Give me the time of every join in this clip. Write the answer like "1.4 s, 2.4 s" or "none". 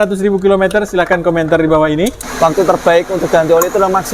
2.2 s